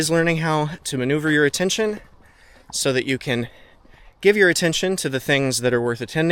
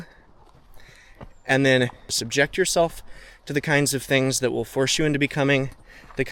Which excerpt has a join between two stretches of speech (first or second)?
second